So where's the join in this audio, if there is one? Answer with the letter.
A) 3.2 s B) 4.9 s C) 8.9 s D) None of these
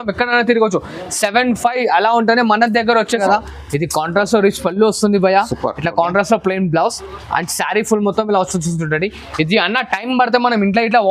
A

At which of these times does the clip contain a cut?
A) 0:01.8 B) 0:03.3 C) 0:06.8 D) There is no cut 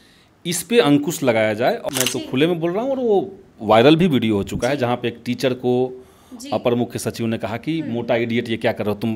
A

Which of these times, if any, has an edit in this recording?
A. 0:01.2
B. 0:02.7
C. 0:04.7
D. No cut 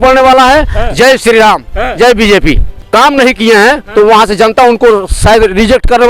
B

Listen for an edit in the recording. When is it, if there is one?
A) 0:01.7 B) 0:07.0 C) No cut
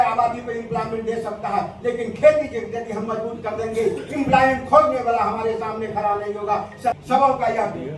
B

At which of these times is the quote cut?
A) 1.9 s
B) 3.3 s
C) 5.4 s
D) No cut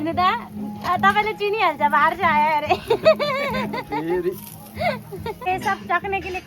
C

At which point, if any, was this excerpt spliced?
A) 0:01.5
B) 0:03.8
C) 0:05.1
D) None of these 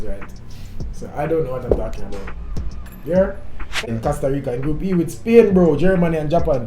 B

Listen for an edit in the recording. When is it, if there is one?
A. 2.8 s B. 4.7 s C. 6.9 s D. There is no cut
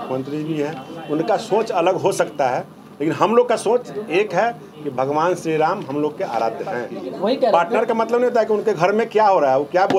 C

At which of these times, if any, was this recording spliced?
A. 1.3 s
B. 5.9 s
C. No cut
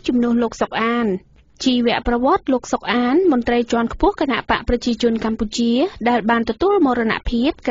A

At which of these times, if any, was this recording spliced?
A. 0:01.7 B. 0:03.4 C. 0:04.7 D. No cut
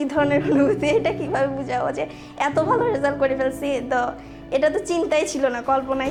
D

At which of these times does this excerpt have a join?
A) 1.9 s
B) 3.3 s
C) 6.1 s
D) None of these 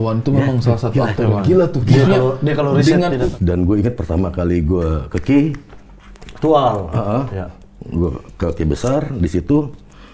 B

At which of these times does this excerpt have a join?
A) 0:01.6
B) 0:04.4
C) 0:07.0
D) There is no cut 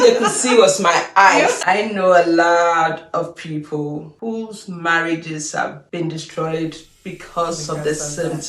A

